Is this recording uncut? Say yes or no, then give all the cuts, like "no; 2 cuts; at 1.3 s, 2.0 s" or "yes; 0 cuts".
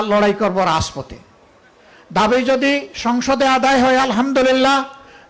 yes; 0 cuts